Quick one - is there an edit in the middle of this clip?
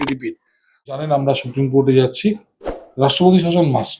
yes; 1 cut; at 1.0 s

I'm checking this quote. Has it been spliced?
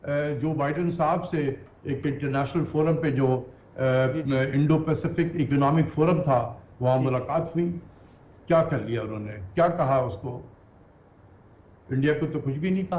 no; 0 cuts

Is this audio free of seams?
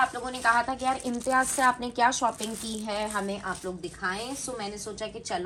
yes; 0 cuts

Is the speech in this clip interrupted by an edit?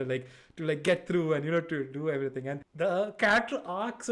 yes; 1 cut; at 2.6 s

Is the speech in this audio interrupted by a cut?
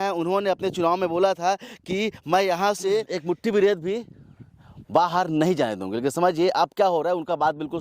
yes; 1 cut; at 3.1 s

